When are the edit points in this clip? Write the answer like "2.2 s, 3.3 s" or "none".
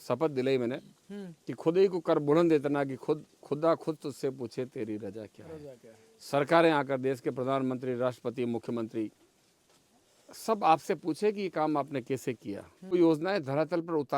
12.9 s